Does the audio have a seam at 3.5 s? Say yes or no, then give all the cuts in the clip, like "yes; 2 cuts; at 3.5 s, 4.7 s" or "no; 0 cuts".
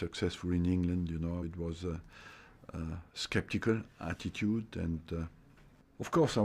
yes; 1 cut; at 3.5 s